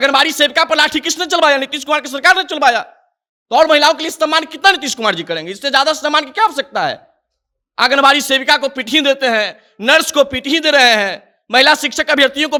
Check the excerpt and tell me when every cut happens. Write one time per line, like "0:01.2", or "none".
none